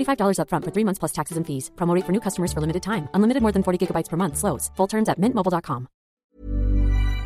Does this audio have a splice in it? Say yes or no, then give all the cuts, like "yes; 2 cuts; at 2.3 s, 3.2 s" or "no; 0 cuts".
yes; 1 cut; at 6.1 s